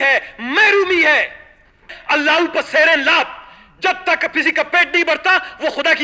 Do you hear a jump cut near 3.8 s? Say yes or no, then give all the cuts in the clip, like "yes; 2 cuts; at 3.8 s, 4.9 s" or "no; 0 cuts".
no; 1 cut; at 1.9 s